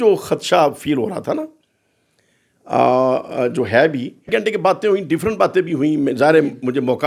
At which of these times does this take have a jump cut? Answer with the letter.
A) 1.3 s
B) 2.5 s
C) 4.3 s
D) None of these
C